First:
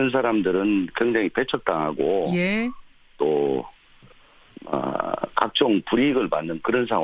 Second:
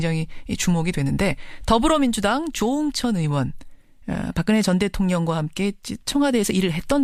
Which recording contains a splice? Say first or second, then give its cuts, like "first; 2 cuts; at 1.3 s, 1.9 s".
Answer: first; 1 cut; at 3.6 s